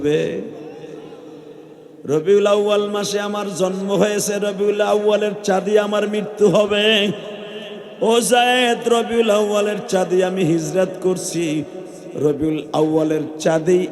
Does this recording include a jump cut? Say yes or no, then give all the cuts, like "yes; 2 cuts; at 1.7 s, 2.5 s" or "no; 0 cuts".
no; 0 cuts